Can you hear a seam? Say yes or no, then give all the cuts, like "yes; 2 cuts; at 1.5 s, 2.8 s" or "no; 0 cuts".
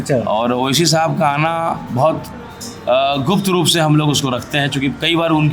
no; 0 cuts